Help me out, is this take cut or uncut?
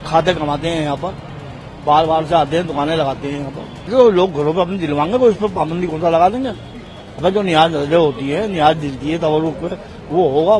cut